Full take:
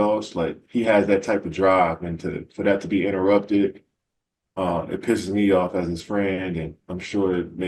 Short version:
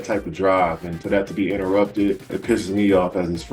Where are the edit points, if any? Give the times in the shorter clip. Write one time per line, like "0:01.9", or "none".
0:00.9
0:02.3